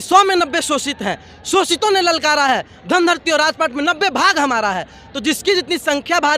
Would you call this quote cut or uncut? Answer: uncut